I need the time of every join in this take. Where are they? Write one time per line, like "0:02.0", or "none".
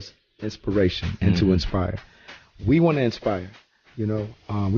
0:02.1

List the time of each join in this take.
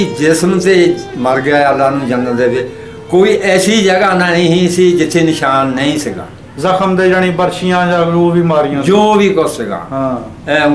none

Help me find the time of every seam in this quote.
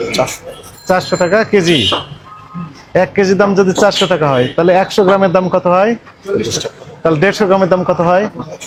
none

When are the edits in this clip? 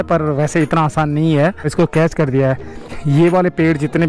0:01.7
0:03.0

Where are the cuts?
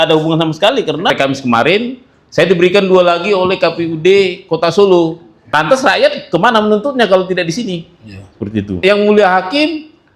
0:01.1
0:05.5
0:08.8

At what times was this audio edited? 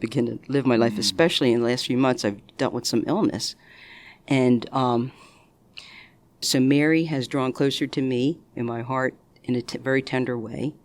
0:06.4
0:09.3

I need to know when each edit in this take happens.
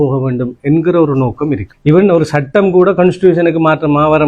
0:01.7

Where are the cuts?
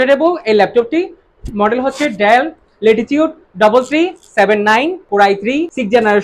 none

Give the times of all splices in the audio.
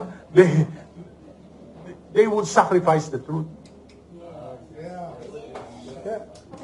none

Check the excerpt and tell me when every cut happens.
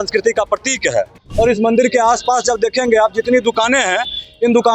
0:01.2

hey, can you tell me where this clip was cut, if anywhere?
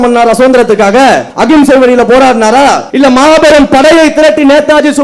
0:01.3
0:02.8

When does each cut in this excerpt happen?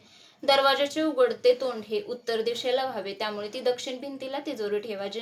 none

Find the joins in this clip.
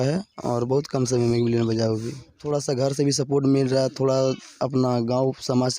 0:02.4

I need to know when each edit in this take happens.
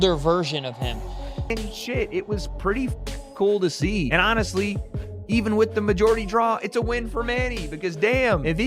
0:01.4

